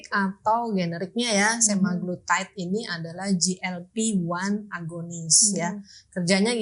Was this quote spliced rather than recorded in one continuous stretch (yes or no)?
no